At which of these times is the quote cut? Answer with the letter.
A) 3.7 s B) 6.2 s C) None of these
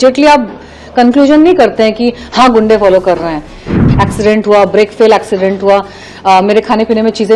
A